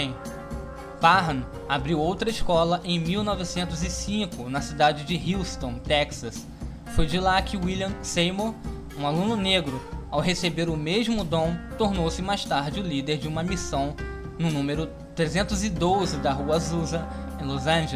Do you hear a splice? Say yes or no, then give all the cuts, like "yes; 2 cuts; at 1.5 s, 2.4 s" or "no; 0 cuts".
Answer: no; 0 cuts